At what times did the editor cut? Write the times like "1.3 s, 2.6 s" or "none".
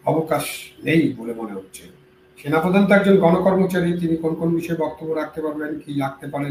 none